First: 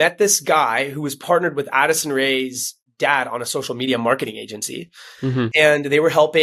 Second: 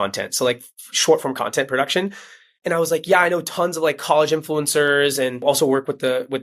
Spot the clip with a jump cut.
second; 1 cut; at 5.4 s

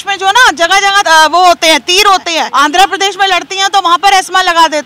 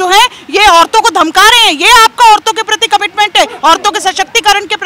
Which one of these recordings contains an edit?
first; 2 cuts; at 1.0 s, 2.4 s

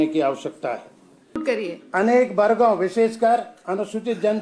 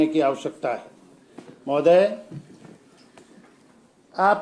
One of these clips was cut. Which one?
first; 1 cut; at 1.4 s

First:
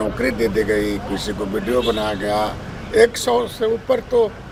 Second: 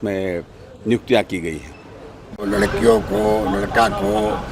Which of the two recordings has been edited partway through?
second; 1 cut; at 2.3 s

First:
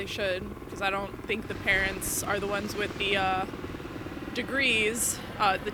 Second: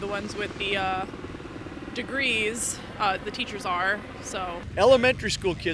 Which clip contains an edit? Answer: second; 1 cut; at 4.6 s

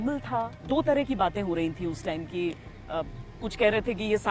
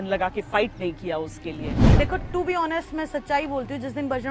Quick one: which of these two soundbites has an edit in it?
second; 1 cut; at 1.9 s

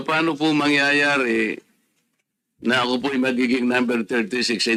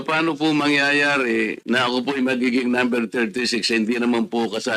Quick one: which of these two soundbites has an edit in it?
second; 1 cut; at 1.6 s

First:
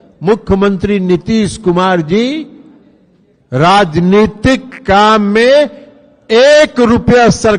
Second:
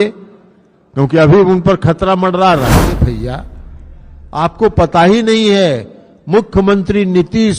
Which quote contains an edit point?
second; 1 cut; at 2.8 s

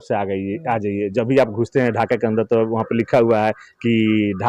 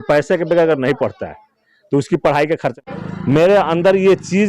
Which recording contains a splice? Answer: second; 1 cut; at 2.8 s

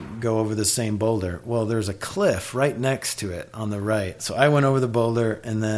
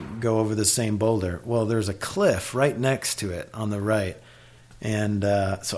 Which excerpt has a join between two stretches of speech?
first; 1 cut; at 4.2 s

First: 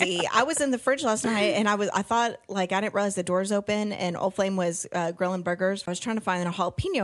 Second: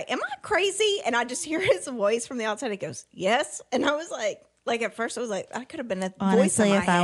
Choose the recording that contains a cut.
first; 1 cut; at 5.8 s

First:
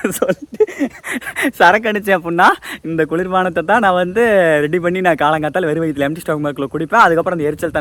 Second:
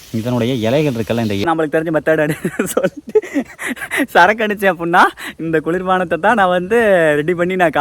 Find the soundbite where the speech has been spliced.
second; 1 cut; at 1.6 s

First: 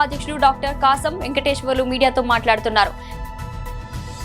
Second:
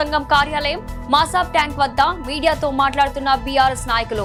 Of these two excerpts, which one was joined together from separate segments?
first; 1 cut; at 3.0 s

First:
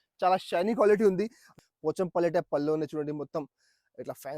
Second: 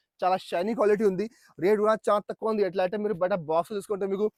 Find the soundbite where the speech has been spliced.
first; 1 cut; at 1.4 s

